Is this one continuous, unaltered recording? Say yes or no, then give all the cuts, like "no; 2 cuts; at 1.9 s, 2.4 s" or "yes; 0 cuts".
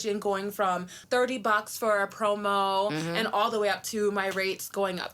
no; 1 cut; at 1.0 s